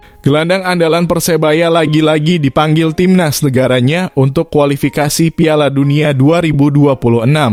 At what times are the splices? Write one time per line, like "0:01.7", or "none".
none